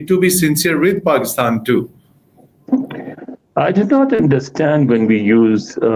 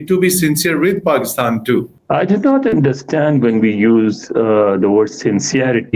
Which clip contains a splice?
second; 1 cut; at 2.0 s

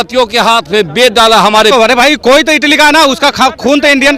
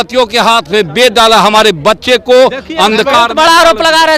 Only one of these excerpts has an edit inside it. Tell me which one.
first; 1 cut; at 1.7 s

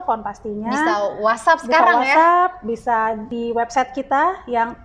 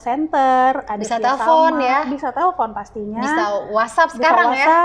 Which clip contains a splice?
first; 1 cut; at 3.3 s

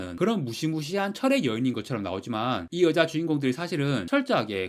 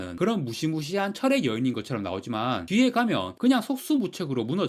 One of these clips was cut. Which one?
first; 1 cut; at 2.6 s

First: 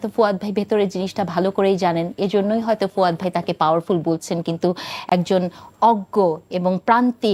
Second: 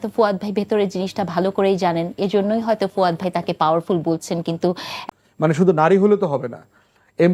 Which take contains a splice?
second; 1 cut; at 4.9 s

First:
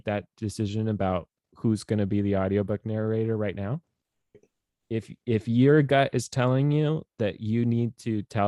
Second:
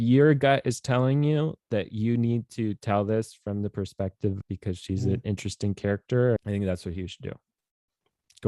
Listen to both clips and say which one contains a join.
second; 2 cuts; at 4.4 s, 6.4 s

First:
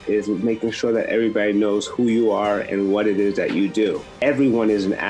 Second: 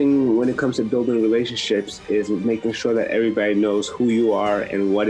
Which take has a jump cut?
first; 1 cut; at 4.2 s

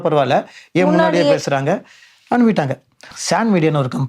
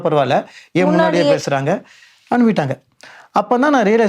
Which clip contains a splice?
first; 1 cut; at 3.1 s

